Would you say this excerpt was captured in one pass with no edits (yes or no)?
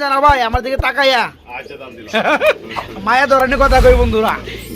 yes